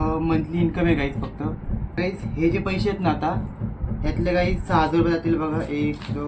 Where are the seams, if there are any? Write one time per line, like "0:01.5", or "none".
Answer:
0:01.9